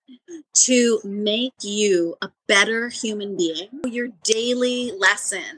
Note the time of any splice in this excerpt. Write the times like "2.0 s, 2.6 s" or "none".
3.8 s